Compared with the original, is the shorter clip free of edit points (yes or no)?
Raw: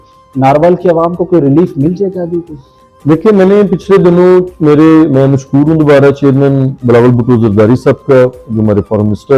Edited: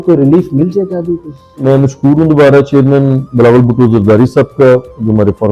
no